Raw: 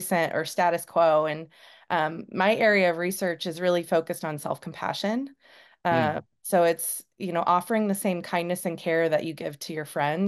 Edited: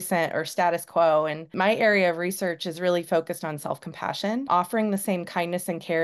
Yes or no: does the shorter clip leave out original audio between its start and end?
yes